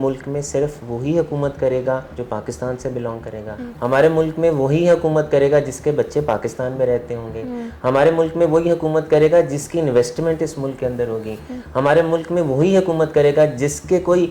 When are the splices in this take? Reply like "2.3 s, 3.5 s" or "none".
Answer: 2.1 s, 3.6 s